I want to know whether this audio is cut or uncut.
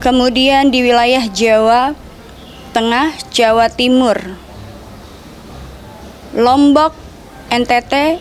uncut